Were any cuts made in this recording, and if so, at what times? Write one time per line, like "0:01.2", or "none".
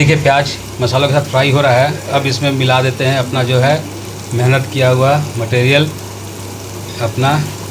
none